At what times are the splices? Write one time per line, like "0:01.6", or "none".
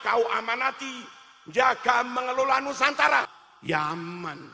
0:03.4